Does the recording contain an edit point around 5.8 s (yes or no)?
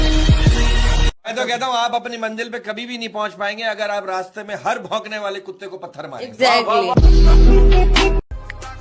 no